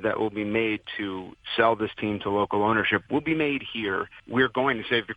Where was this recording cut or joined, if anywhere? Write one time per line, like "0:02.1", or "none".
0:01.4
0:04.2